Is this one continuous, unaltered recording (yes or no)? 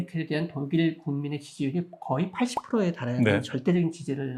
yes